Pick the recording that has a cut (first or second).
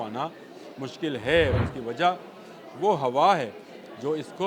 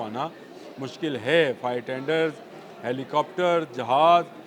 first